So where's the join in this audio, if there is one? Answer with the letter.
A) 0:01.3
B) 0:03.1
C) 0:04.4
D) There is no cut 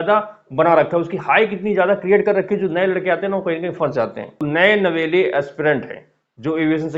C